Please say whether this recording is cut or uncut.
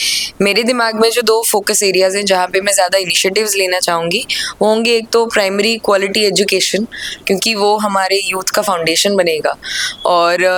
uncut